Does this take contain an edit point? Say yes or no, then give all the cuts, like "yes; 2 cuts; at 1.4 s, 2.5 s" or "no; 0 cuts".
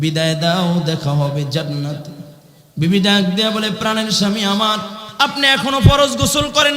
yes; 1 cut; at 5.0 s